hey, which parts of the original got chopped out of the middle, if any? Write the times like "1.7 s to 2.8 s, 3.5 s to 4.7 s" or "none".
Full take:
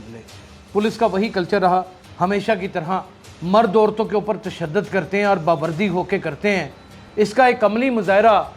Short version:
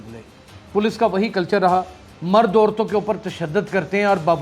2.0 s to 3.2 s